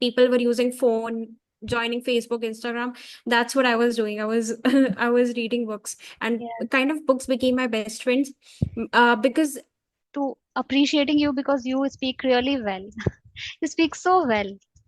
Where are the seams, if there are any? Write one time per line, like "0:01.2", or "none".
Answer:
0:10.1